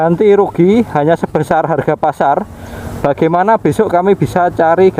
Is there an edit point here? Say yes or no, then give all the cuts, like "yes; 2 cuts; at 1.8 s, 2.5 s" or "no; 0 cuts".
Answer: no; 0 cuts